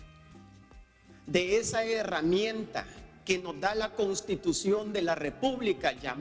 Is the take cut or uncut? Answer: uncut